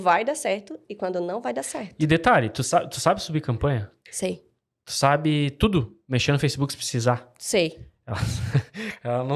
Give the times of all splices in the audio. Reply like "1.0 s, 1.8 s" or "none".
none